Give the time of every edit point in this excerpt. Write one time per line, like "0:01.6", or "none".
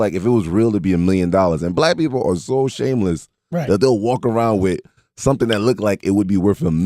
0:03.2